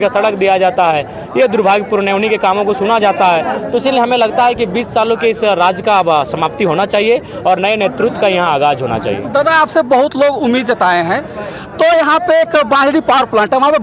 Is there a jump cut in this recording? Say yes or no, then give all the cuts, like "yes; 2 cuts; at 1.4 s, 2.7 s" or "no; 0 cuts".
no; 0 cuts